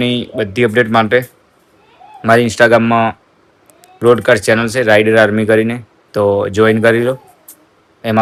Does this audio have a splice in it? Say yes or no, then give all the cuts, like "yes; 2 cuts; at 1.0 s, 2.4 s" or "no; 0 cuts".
no; 0 cuts